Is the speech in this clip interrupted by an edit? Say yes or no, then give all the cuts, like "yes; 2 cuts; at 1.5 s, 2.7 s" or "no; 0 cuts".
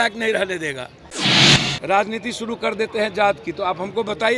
yes; 1 cut; at 1.2 s